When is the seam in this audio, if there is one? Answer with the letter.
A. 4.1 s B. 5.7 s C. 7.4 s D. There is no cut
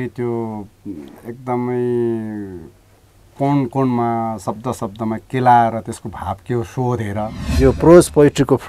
C